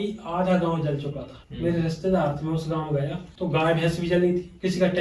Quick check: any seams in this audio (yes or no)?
no